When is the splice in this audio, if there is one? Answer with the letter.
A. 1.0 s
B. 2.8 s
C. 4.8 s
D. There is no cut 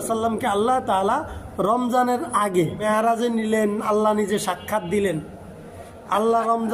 B